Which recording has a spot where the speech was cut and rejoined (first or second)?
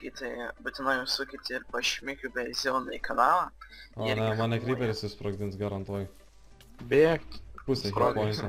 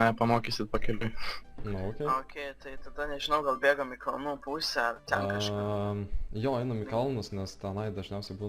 second